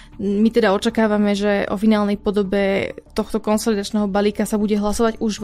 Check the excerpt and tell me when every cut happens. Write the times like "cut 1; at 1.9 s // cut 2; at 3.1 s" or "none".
none

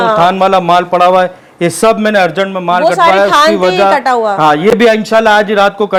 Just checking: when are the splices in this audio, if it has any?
none

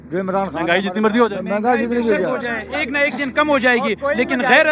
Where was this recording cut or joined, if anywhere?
none

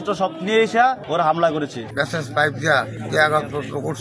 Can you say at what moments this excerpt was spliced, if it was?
cut 1; at 1.0 s // cut 2; at 1.9 s // cut 3; at 3.0 s

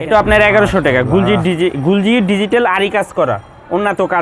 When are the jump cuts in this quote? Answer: none

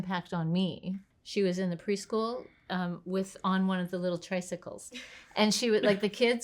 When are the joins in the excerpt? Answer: cut 1; at 1.0 s

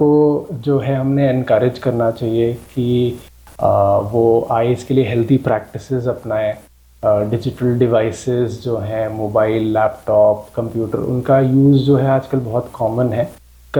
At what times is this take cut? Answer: none

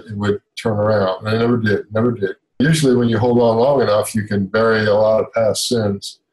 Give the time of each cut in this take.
cut 1; at 2.6 s

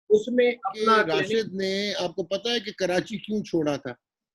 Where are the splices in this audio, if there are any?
cut 1; at 1.3 s

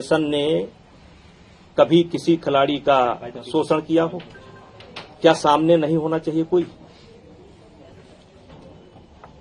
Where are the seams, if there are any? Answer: none

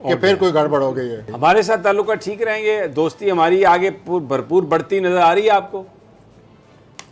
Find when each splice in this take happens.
cut 1; at 1.2 s

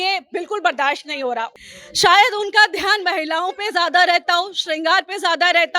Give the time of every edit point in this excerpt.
cut 1; at 1.5 s

